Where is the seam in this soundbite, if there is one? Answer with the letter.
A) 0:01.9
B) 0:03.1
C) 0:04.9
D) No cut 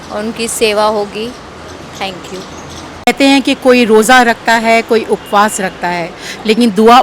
B